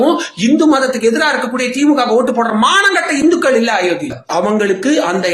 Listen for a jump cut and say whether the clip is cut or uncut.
cut